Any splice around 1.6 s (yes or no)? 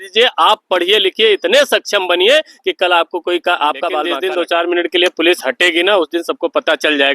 no